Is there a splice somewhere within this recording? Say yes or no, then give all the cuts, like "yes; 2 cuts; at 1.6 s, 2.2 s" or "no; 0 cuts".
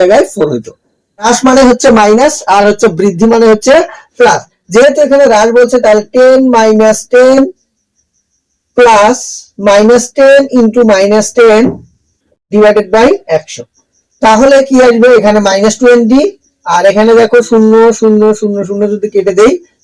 yes; 1 cut; at 1.3 s